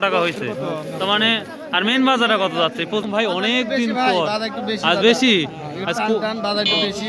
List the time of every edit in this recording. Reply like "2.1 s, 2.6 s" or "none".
3.1 s